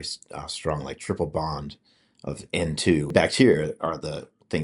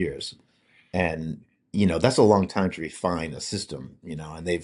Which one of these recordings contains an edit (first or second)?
first